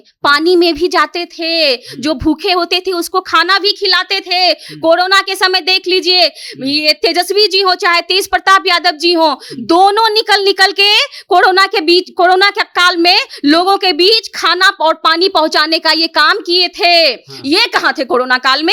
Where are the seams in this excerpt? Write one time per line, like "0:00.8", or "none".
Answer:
none

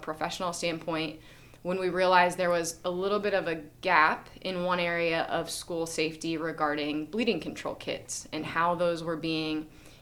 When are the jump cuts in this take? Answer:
none

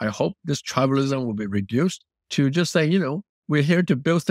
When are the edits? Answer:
none

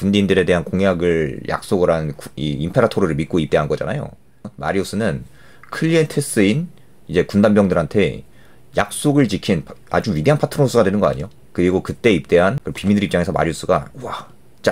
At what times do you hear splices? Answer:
0:04.5
0:12.6

